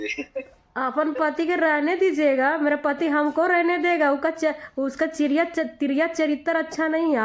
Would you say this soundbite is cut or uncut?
uncut